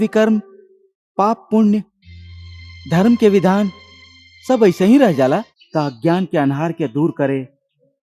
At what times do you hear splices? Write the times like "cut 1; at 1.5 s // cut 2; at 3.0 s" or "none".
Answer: cut 1; at 5.6 s